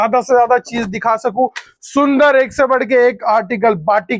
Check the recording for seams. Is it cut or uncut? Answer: uncut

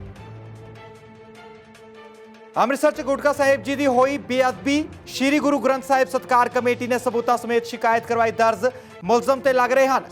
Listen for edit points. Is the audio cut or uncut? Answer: cut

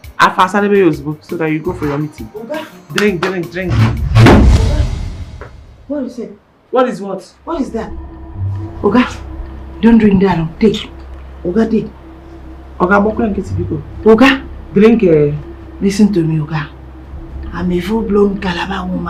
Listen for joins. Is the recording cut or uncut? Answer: uncut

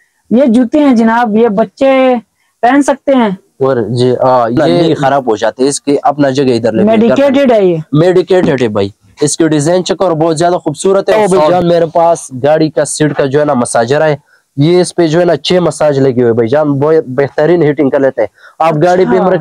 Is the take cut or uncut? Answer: cut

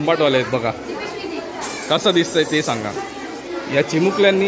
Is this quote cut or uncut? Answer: uncut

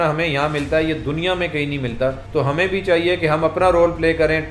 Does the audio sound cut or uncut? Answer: cut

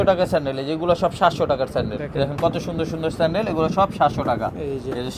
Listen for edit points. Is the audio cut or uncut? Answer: cut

